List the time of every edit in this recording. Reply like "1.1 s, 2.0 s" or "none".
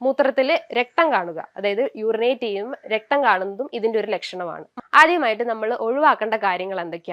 4.6 s

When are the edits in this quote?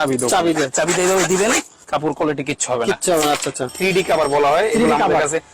3.7 s

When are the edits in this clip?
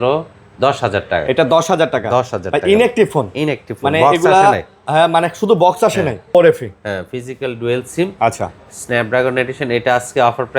6.3 s

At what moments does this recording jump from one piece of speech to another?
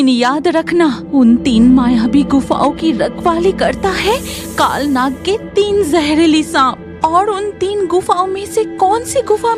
1.0 s

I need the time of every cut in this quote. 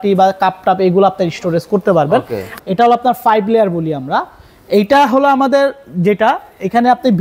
2.5 s

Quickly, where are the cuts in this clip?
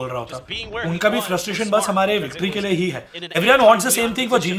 none

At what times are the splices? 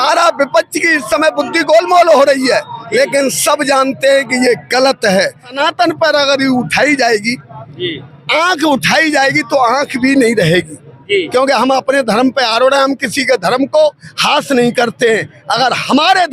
5.6 s

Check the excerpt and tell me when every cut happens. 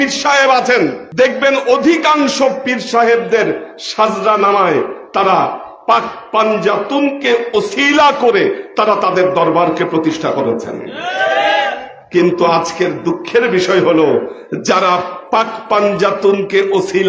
1.0 s

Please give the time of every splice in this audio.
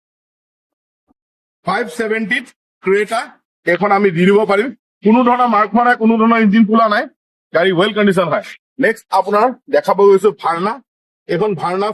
none

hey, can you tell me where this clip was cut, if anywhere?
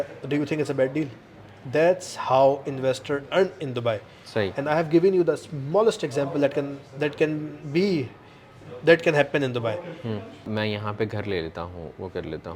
10.5 s

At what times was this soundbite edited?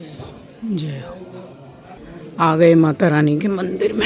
2.0 s

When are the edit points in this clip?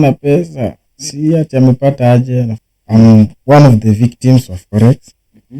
2.6 s

